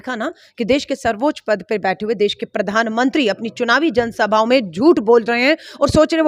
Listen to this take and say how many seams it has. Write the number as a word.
zero